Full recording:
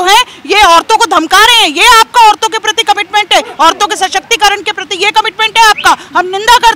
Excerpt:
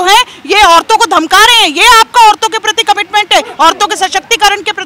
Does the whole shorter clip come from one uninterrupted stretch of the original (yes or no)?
yes